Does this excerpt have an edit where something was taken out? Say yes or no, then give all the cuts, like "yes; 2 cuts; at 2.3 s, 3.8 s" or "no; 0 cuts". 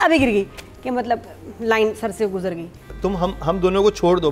yes; 1 cut; at 2.9 s